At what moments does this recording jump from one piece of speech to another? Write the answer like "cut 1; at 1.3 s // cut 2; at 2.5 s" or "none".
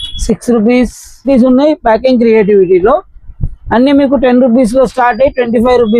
cut 1; at 1.3 s